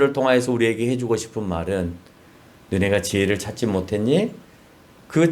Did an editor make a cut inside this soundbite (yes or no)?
no